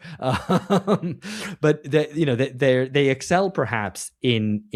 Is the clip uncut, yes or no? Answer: yes